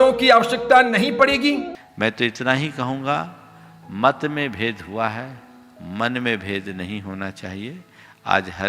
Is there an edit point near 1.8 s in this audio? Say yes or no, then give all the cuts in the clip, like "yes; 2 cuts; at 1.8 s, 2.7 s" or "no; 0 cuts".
yes; 1 cut; at 1.8 s